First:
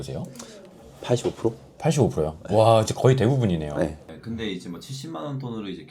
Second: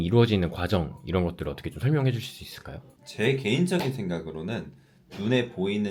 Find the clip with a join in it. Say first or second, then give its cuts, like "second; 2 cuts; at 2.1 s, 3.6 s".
first; 1 cut; at 4.1 s